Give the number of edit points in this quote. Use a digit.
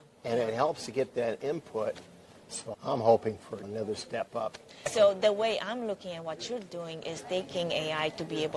1